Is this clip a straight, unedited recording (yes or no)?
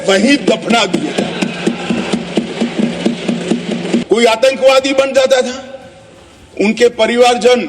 no